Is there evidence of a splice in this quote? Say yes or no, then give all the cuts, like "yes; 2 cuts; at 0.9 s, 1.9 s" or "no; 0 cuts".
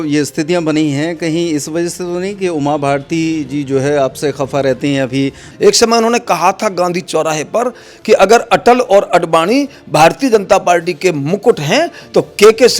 yes; 1 cut; at 5.4 s